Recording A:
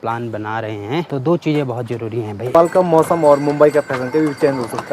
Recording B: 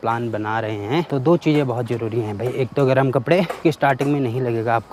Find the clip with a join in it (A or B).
A